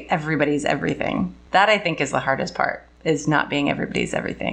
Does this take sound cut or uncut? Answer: cut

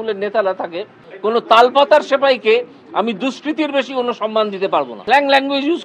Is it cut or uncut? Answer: cut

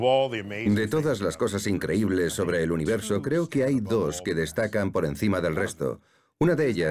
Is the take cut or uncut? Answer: cut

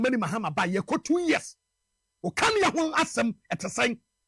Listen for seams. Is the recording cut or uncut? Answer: uncut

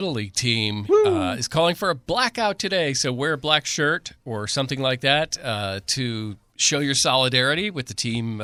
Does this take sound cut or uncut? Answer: uncut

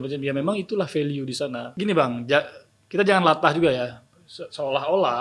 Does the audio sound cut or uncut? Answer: cut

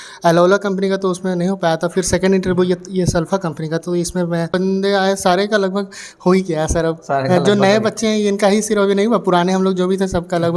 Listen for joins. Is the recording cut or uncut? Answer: cut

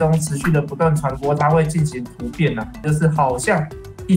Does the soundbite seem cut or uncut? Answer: cut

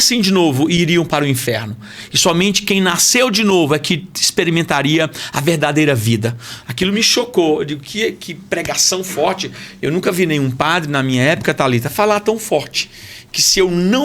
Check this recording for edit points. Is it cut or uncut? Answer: uncut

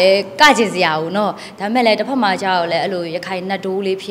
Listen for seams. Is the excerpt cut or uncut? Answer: uncut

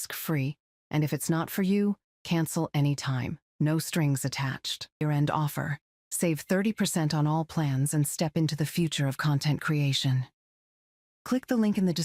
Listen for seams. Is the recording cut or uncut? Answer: cut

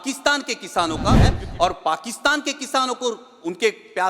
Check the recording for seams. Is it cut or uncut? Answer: cut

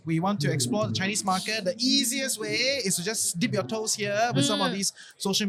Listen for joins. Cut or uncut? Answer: uncut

